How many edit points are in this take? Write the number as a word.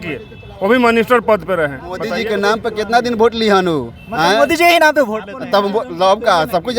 one